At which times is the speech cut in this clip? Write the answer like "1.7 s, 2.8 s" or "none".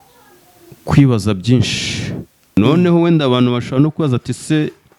2.6 s